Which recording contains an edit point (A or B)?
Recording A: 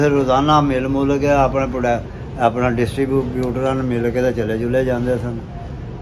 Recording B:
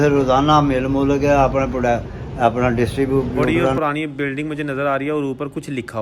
B